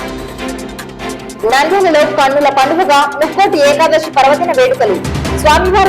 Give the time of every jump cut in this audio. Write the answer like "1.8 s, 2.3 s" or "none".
1.3 s